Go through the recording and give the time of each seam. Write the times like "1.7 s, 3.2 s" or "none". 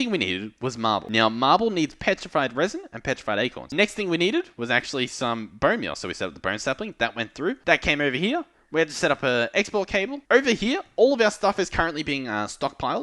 1.0 s, 3.7 s, 7.6 s, 10.2 s